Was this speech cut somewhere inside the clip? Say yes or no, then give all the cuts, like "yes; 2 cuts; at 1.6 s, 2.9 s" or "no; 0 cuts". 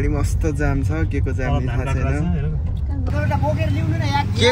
yes; 1 cut; at 3.1 s